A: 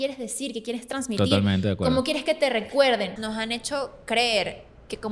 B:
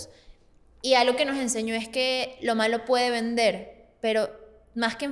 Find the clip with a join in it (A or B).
A